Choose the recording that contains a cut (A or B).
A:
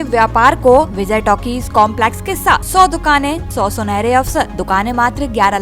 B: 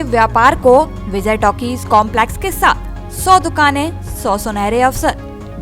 A